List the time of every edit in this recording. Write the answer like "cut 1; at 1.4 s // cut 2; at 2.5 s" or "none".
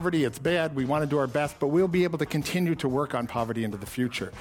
none